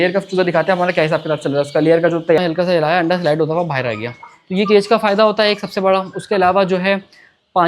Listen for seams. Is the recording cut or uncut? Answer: cut